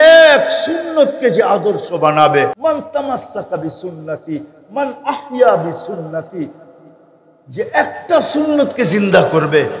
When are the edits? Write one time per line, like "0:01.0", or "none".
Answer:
0:02.6

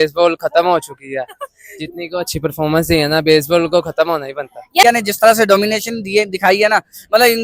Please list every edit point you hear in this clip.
0:04.8

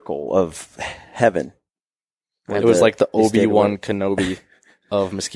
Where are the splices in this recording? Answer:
none

